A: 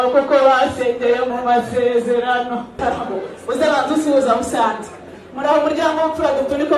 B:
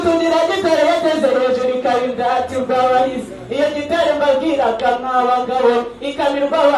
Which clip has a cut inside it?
A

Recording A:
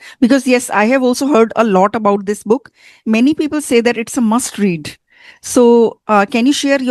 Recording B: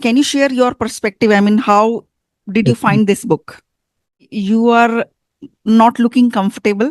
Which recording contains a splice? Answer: B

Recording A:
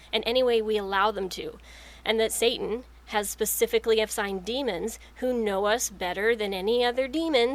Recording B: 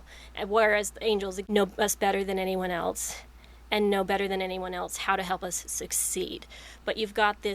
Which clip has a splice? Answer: B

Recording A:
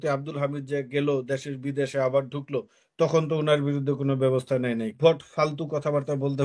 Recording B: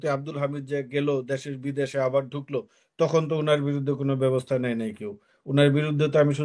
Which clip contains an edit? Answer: A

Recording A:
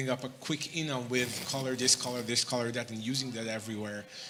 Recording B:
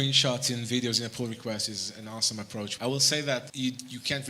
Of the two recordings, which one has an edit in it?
B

